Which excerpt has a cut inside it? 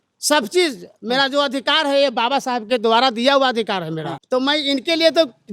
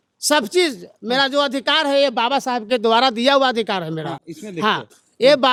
first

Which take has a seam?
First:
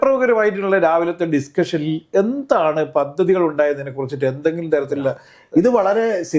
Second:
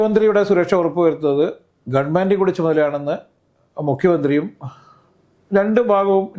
first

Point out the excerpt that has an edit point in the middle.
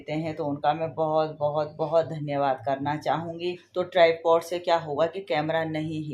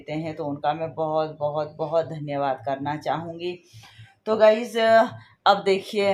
first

